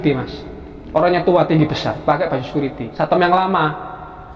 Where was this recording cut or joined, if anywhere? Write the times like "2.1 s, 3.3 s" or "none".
2.8 s